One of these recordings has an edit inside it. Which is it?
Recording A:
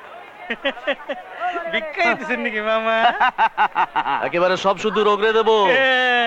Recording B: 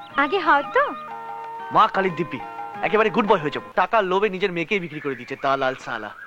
B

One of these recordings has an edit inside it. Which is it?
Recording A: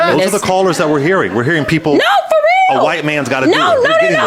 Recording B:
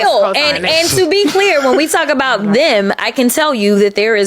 B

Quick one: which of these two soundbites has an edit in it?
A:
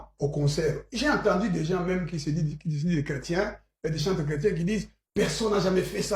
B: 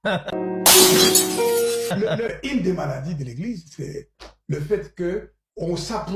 B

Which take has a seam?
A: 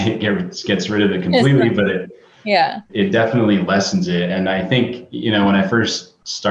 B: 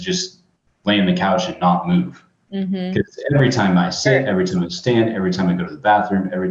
A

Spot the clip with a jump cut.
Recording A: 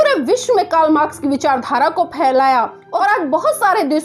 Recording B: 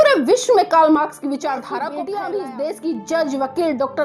B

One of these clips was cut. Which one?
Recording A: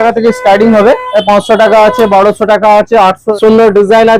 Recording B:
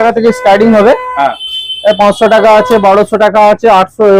A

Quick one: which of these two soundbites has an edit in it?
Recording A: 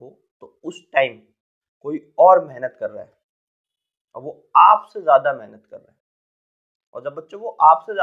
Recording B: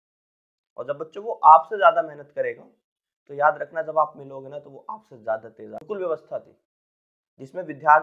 B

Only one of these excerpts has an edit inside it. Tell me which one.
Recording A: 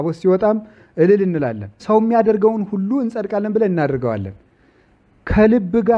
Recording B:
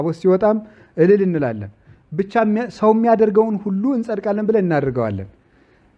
A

